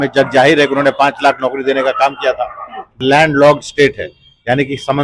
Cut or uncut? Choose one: cut